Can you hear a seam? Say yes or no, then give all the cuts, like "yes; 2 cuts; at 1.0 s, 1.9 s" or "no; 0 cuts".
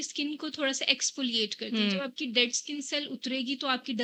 no; 0 cuts